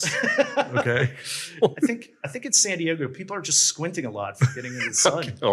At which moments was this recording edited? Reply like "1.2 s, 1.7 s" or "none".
1.7 s